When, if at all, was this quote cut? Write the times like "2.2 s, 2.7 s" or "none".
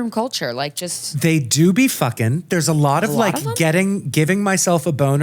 1.0 s